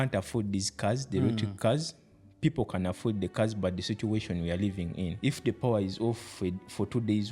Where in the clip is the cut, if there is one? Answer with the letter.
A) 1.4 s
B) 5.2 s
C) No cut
B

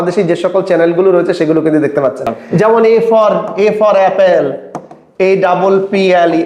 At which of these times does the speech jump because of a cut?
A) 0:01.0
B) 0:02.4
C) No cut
B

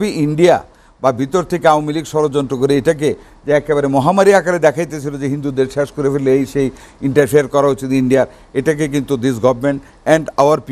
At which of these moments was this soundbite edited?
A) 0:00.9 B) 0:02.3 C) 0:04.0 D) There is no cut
D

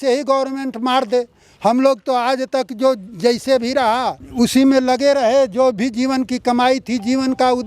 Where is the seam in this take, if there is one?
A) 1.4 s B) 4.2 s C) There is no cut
B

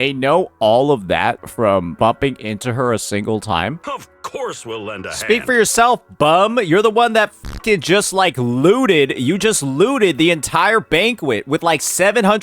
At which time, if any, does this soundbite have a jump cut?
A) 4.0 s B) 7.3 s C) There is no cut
A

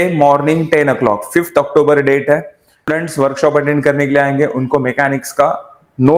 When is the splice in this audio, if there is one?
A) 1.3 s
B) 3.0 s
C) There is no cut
B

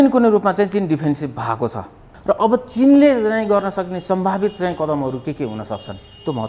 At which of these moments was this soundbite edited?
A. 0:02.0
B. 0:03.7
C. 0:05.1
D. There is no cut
A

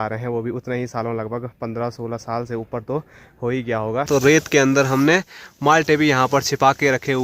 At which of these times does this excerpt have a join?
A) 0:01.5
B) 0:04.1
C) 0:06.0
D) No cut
B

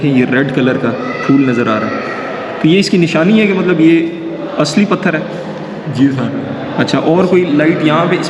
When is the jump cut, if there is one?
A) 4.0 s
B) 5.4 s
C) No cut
C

